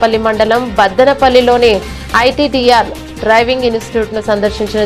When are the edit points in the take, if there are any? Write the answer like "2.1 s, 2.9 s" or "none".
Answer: none